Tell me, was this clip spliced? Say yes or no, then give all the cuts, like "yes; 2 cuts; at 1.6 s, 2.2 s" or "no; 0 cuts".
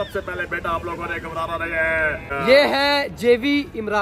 yes; 1 cut; at 2.3 s